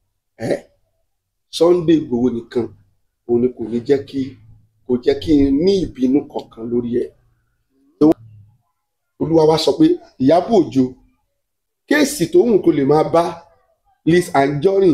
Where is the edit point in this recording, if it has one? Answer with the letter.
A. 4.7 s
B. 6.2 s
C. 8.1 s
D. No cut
C